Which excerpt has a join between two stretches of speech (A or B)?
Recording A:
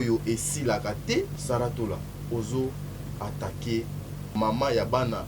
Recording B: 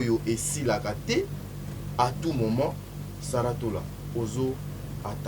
A